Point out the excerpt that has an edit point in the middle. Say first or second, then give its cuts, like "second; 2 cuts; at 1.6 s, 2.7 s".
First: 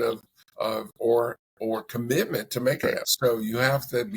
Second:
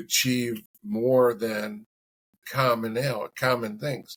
first; 1 cut; at 2.8 s